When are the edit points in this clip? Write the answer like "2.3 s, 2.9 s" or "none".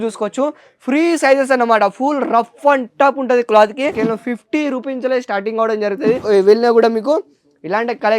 3.9 s, 6.2 s